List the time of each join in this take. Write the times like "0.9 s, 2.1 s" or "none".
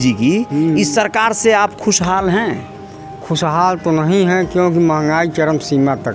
none